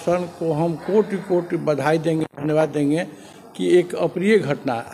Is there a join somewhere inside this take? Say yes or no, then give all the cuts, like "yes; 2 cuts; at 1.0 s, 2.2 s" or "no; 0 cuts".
no; 0 cuts